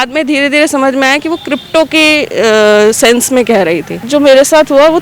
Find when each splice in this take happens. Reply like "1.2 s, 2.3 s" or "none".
4.0 s